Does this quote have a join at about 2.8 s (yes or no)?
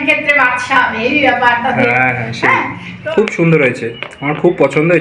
yes